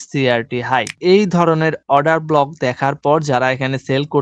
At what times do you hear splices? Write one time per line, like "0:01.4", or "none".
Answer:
0:00.9